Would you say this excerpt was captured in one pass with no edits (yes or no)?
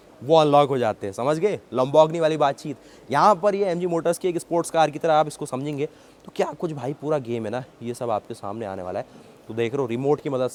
yes